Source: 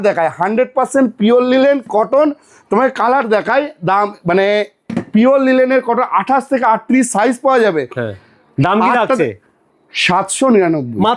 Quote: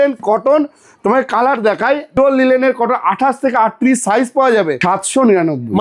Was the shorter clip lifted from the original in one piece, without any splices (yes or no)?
no